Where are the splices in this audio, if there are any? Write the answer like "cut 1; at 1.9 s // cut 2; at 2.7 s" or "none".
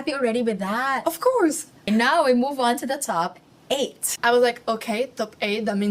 cut 1; at 1.9 s // cut 2; at 4.1 s